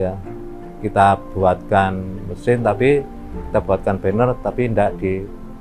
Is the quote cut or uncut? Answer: uncut